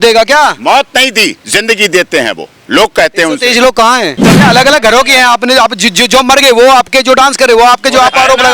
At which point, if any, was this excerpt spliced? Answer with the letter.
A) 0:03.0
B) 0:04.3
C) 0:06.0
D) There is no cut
B